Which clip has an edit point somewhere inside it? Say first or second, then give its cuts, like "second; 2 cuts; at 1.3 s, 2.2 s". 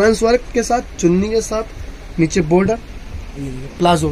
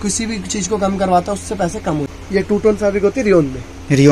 second; 1 cut; at 2.2 s